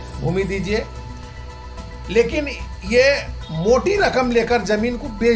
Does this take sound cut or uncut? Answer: uncut